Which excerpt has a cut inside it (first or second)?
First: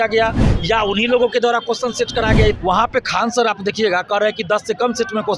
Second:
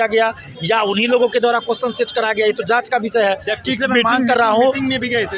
first